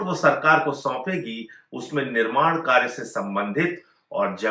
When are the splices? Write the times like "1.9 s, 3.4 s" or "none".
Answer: none